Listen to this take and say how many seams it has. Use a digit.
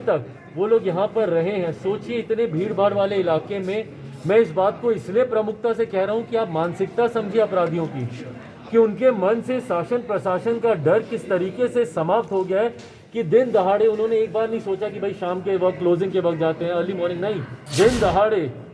1